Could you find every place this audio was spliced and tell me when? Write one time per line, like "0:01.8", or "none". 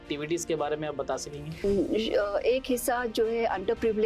0:01.6